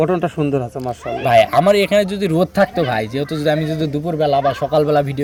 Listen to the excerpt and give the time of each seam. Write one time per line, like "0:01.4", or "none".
none

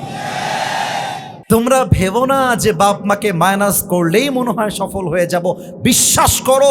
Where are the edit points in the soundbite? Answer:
0:01.3

